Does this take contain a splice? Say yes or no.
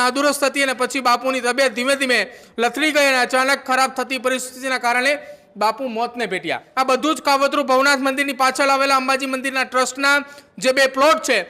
yes